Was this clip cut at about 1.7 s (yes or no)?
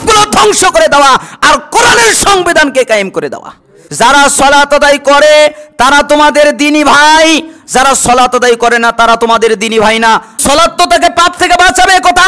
no